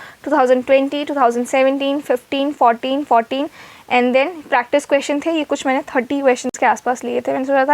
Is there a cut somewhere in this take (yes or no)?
no